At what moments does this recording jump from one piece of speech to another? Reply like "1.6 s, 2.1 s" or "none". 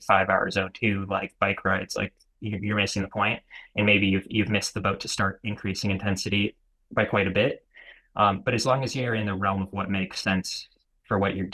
none